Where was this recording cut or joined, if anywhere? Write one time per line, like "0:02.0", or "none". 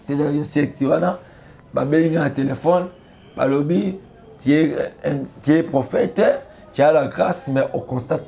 none